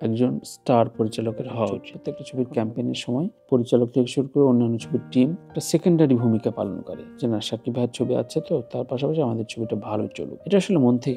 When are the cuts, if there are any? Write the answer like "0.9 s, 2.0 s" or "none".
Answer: 2.0 s